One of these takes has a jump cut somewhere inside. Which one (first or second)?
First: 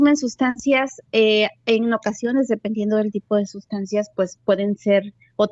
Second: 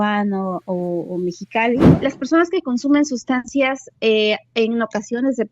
second